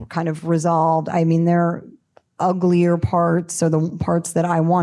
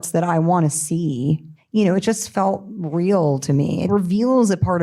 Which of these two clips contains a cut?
second; 2 cuts; at 1.5 s, 3.9 s

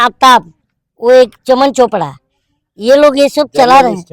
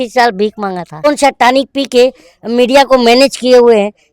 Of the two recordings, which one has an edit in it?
second; 1 cut; at 1.0 s

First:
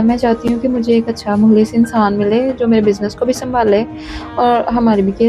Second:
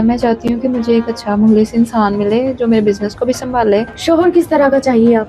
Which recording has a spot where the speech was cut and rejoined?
second; 1 cut; at 3.9 s

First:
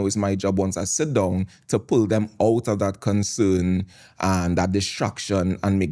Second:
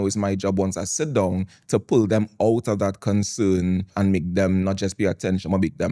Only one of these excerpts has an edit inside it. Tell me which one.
second; 1 cut; at 3.9 s

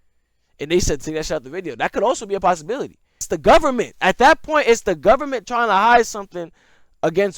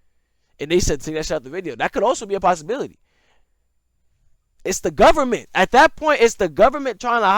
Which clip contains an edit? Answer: first; 1 cut; at 3.2 s

